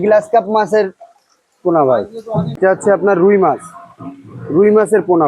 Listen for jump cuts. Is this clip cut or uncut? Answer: cut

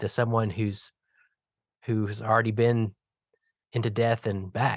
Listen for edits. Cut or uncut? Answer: uncut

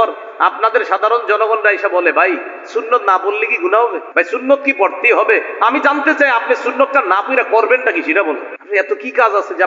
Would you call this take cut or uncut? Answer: cut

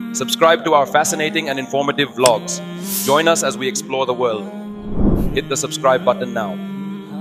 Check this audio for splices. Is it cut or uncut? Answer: uncut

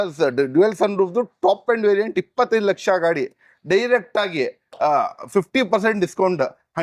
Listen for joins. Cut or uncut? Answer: uncut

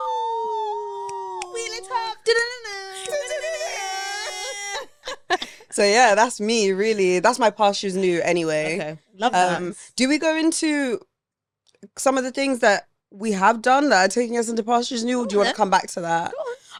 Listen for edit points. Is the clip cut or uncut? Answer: uncut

